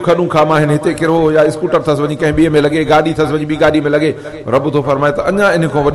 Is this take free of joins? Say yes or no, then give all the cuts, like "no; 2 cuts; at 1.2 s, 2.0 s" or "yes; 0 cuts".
yes; 0 cuts